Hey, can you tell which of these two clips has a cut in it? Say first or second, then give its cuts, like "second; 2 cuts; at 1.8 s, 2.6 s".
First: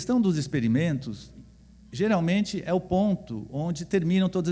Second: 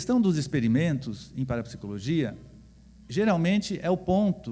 first; 1 cut; at 1.3 s